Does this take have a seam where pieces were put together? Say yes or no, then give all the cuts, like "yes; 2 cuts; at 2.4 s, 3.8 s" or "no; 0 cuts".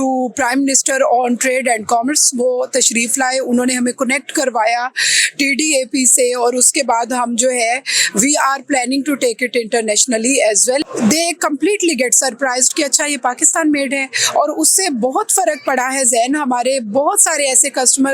yes; 1 cut; at 10.9 s